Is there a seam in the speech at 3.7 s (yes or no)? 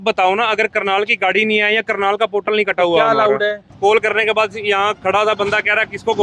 yes